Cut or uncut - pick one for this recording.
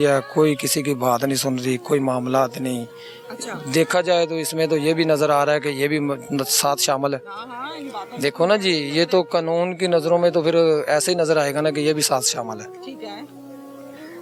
uncut